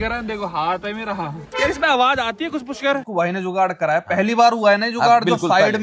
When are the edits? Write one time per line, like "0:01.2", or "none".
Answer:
0:01.4
0:03.0